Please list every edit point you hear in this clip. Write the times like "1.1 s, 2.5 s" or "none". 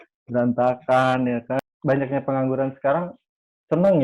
1.6 s